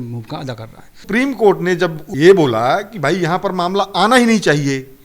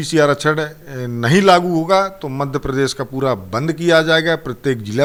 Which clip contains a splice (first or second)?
first